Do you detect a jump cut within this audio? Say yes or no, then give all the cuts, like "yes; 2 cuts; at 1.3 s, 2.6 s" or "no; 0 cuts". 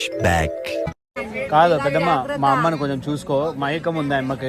yes; 1 cut; at 1.2 s